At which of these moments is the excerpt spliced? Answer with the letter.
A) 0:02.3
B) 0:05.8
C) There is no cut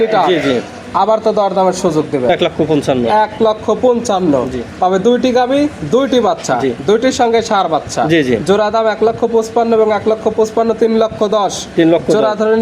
A